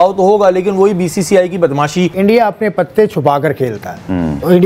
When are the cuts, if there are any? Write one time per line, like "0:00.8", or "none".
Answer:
0:02.1